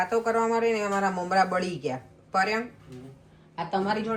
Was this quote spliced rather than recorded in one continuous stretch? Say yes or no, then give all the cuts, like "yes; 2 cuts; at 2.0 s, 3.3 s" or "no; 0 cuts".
no; 0 cuts